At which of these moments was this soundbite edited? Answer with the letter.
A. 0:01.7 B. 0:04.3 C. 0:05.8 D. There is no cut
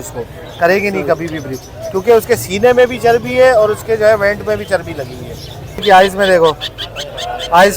C